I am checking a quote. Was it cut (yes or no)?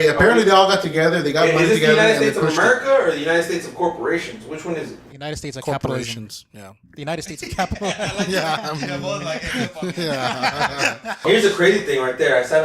yes